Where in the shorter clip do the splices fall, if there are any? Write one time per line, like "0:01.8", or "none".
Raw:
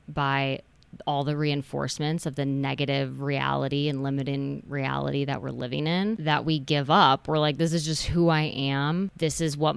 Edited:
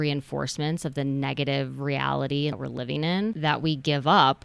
0:02.5